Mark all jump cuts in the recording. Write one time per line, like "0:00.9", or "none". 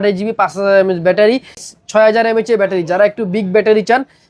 0:01.7